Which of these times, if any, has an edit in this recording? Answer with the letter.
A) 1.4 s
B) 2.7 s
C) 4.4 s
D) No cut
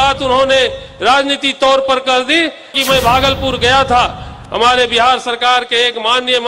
B